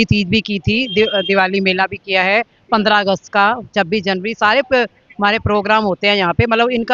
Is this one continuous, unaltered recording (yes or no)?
yes